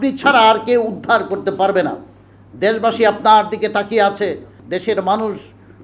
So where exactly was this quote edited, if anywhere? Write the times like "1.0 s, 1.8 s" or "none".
4.6 s